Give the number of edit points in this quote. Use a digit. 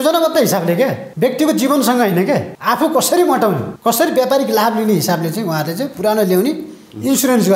3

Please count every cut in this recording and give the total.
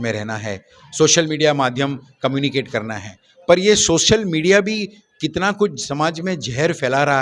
0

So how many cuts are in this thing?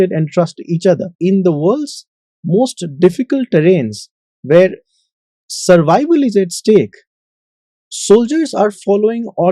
1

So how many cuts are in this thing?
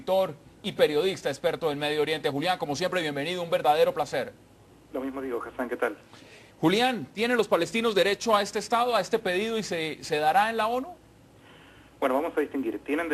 1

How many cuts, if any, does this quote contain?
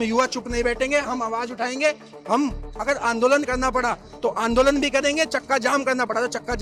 0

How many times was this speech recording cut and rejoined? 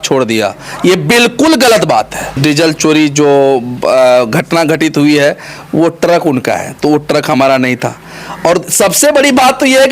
1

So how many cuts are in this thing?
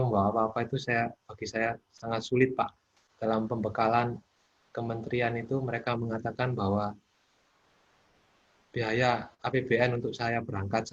1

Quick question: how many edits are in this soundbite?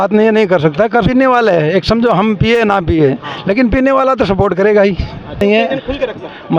2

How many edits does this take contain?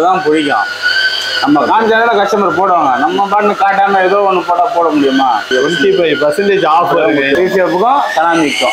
2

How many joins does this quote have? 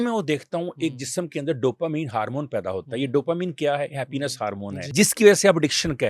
1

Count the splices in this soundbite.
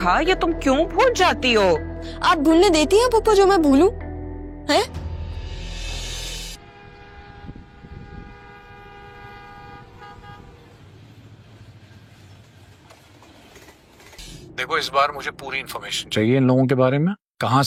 0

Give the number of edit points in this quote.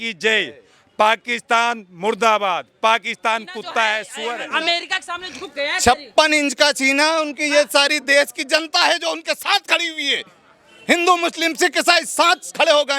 1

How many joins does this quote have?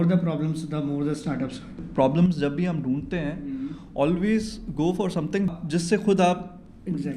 2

